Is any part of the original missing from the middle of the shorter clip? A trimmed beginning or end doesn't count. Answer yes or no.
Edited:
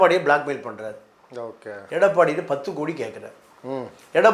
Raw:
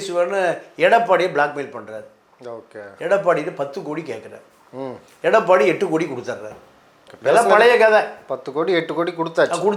no